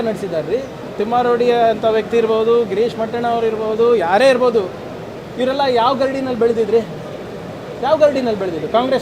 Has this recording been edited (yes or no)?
yes